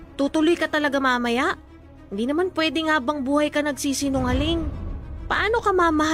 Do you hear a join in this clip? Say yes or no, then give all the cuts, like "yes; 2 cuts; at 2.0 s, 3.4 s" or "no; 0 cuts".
no; 0 cuts